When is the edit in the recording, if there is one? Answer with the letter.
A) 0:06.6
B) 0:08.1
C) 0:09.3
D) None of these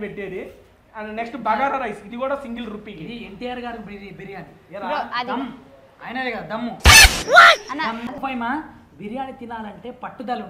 B